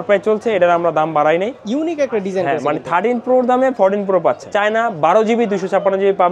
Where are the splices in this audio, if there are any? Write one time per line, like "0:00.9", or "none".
0:01.6
0:04.5